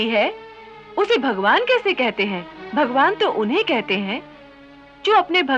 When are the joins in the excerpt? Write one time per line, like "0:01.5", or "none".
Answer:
0:02.5